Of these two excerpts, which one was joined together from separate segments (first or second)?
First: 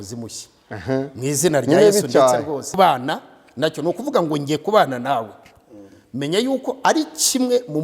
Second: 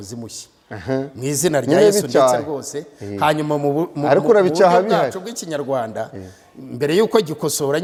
first